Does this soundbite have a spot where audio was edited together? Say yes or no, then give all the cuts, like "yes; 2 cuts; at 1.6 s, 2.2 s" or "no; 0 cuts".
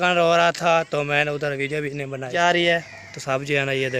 yes; 1 cut; at 2.3 s